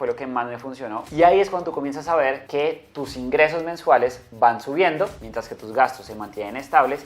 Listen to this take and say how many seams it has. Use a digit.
1